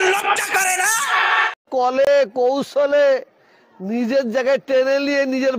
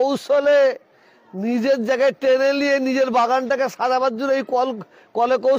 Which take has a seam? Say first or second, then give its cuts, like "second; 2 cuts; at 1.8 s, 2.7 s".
first; 1 cut; at 1.5 s